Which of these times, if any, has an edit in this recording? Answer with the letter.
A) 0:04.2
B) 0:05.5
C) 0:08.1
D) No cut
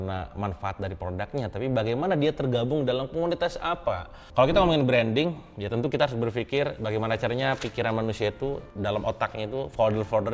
A